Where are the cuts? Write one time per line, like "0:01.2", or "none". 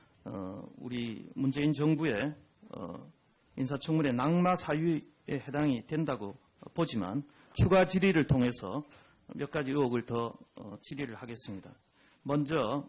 none